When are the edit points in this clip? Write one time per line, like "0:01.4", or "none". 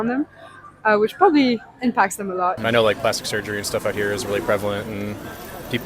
0:02.6

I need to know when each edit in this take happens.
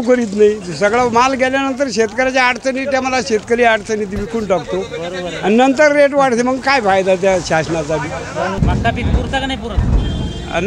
0:08.6

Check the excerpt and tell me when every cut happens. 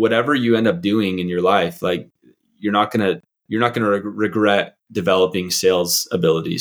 0:03.3

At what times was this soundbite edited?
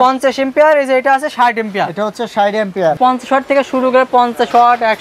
0:03.0

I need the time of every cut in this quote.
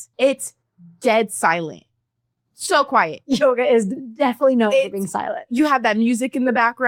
none

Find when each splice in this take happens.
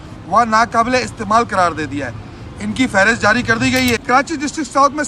0:04.0

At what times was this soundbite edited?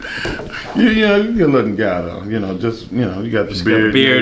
none

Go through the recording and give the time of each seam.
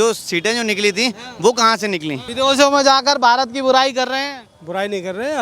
0:02.2

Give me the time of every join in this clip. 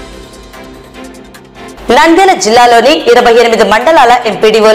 none

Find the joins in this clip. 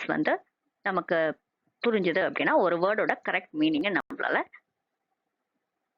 none

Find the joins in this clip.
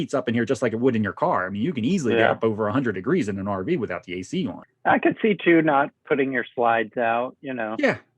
0:04.6

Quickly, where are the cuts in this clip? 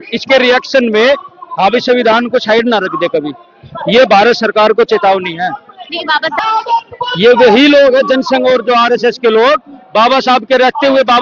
0:06.4

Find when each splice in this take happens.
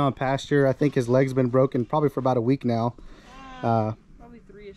none

